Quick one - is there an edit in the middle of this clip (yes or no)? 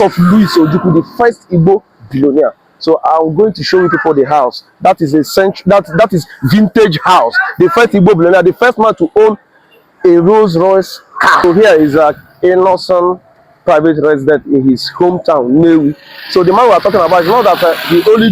yes